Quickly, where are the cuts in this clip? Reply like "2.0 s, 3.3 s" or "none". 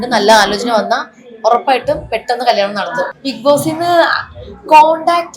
3.2 s